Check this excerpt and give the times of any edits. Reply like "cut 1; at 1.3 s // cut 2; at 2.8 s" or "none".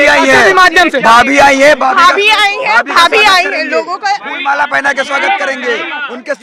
none